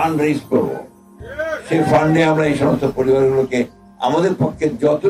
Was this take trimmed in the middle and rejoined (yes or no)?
no